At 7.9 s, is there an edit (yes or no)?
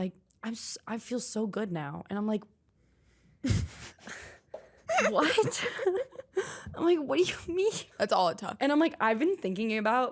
yes